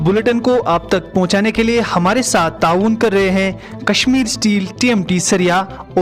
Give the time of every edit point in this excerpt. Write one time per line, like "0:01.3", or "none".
none